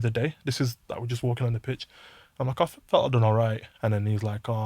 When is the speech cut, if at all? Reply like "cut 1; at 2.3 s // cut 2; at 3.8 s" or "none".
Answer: cut 1; at 3.7 s

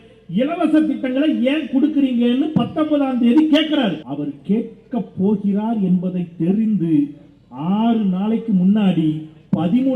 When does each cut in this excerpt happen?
cut 1; at 4.0 s

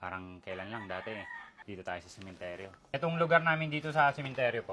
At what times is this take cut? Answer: cut 1; at 1.5 s // cut 2; at 2.7 s

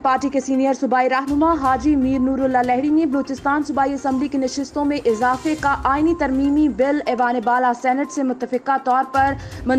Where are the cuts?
none

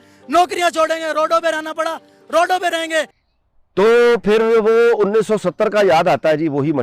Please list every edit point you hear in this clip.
cut 1; at 3.2 s

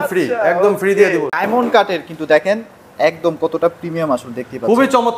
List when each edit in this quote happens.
cut 1; at 1.4 s

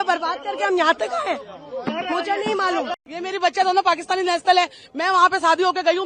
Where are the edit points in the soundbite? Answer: none

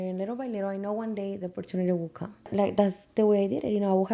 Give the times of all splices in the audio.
cut 1; at 2.5 s

